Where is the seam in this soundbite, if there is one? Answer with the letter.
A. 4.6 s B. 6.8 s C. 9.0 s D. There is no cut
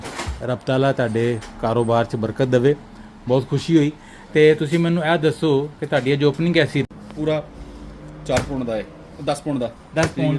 B